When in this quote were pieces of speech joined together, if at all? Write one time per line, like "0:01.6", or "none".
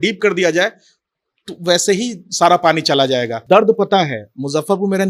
0:03.4